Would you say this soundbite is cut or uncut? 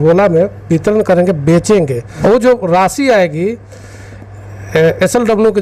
uncut